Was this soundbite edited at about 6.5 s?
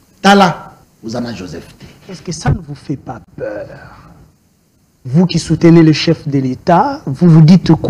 no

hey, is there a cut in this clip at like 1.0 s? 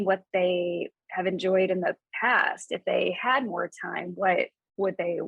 yes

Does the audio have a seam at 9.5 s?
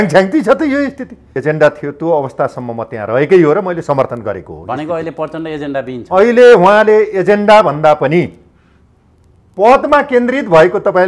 no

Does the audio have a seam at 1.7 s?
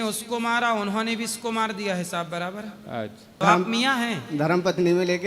no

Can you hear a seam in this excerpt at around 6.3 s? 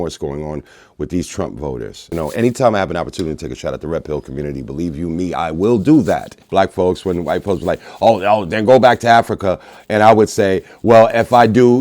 yes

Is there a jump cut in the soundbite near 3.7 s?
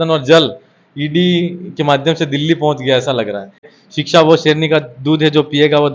yes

